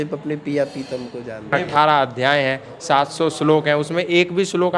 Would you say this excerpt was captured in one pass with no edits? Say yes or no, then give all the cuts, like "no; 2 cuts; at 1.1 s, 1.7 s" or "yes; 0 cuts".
no; 1 cut; at 1.6 s